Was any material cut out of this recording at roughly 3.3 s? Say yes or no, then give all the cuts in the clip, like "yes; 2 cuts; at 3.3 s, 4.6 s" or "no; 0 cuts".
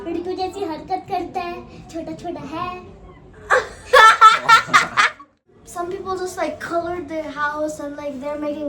yes; 2 cuts; at 3.3 s, 5.5 s